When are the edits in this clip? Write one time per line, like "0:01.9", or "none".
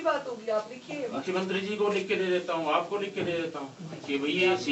none